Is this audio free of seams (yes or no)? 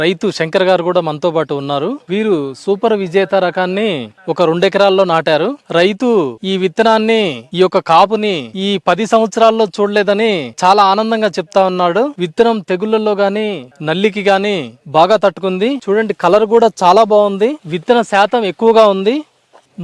yes